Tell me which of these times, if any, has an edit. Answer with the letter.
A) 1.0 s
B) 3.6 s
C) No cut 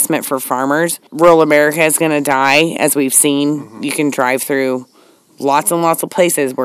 A